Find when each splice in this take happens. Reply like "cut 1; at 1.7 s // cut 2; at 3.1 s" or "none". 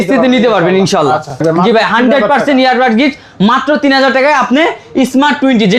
cut 1; at 1.4 s